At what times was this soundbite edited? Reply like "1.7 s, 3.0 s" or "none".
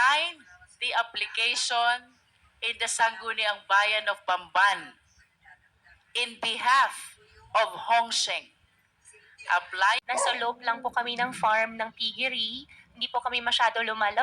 10.0 s